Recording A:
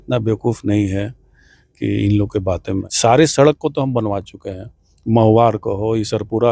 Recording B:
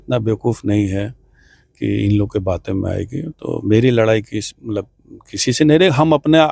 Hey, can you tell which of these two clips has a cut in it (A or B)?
A